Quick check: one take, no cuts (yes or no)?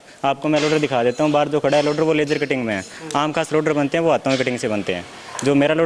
yes